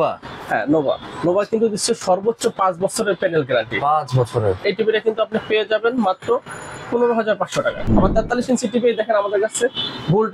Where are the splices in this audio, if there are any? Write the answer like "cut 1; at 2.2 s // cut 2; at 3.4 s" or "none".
cut 1; at 4.6 s // cut 2; at 7.9 s